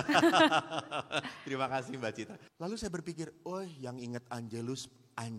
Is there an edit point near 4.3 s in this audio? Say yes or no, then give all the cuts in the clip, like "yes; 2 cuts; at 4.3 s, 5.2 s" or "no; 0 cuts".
no; 1 cut; at 2.4 s